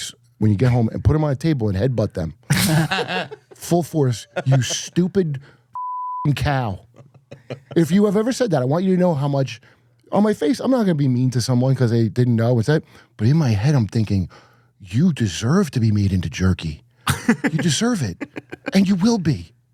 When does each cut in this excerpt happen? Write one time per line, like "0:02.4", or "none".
none